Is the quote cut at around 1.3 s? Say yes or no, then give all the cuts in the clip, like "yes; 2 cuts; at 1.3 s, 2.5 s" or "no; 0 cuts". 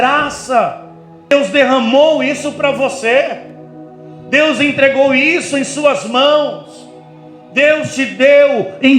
yes; 1 cut; at 1.3 s